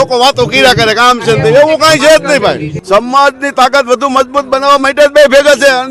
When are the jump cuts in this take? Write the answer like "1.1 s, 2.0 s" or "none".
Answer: 2.7 s